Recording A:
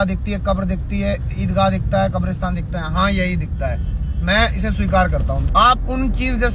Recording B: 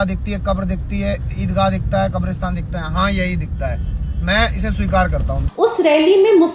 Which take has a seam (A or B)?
B